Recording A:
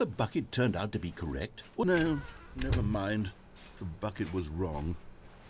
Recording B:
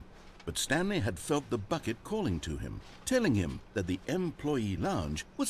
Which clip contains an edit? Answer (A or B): A